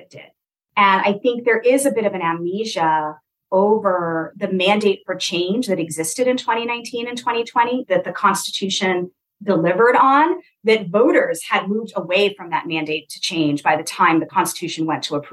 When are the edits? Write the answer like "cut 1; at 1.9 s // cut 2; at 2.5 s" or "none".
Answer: cut 1; at 14.3 s